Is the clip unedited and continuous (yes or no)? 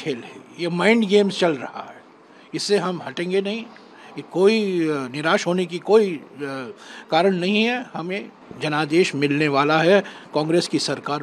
yes